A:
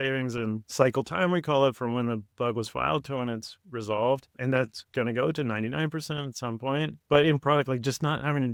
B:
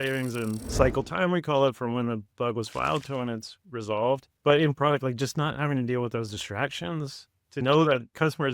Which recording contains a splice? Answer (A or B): B